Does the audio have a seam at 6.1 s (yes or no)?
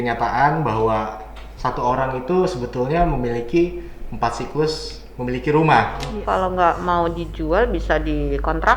yes